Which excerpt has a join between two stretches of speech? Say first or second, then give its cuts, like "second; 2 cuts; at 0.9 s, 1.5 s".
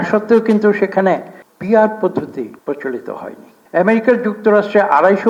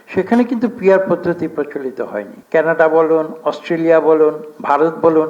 second; 1 cut; at 2.4 s